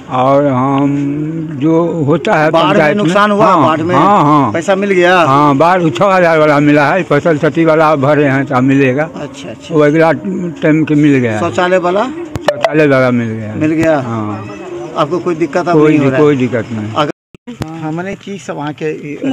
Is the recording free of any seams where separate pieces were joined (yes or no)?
yes